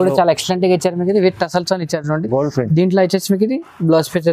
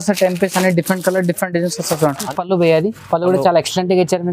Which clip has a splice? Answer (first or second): second